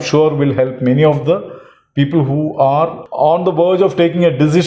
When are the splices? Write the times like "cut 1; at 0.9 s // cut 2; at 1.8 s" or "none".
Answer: none